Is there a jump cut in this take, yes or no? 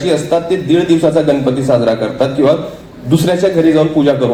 no